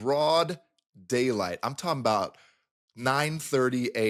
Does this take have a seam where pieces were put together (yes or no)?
no